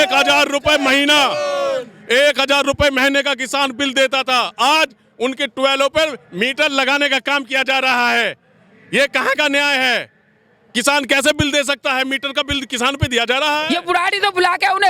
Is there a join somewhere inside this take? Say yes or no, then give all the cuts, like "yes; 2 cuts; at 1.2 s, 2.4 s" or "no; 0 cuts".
yes; 1 cut; at 13.6 s